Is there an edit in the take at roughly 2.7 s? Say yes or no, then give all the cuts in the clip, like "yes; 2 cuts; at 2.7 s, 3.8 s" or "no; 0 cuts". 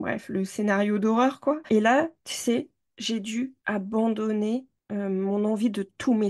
no; 0 cuts